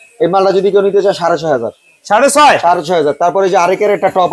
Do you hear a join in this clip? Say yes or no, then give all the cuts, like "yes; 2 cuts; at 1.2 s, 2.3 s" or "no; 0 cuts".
no; 0 cuts